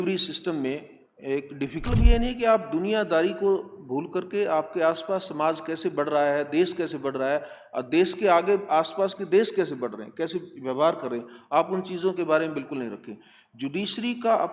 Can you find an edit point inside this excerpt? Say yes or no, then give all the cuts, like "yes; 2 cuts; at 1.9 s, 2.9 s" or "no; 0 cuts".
yes; 1 cut; at 1.8 s